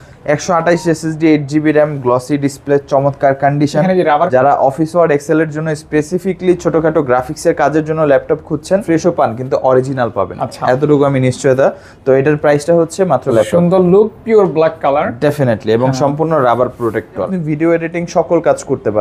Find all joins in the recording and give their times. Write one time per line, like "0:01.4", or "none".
0:04.3
0:08.8
0:13.3
0:17.3